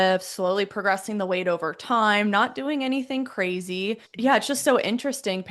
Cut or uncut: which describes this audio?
cut